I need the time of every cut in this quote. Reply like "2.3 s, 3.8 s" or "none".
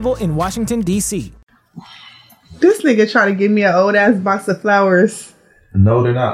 1.4 s